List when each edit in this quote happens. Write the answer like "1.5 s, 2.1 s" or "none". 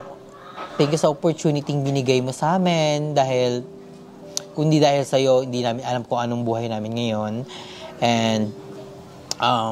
none